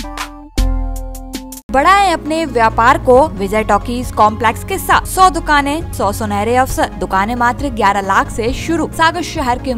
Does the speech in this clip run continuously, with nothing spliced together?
no; 6 cuts; at 1.7 s, 3.4 s, 5.1 s, 5.9 s, 7.0 s, 8.9 s

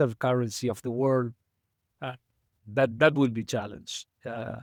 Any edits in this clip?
no; 0 cuts

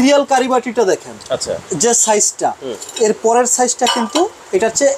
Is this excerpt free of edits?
yes; 0 cuts

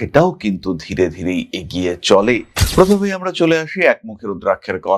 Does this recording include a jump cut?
yes; 1 cut; at 2.5 s

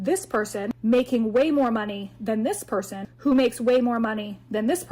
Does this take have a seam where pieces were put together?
no; 0 cuts

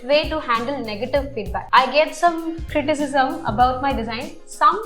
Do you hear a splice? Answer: yes; 1 cut; at 1.6 s

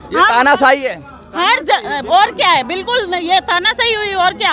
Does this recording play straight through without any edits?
yes; 0 cuts

